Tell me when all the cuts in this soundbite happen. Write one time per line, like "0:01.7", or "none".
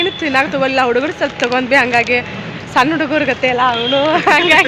none